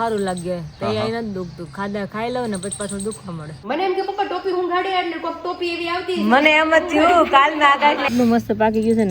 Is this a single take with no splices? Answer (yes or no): no